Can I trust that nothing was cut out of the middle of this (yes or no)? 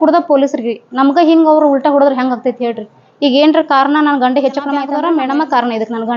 no